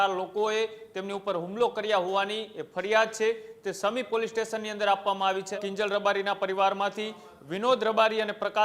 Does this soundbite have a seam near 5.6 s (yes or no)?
yes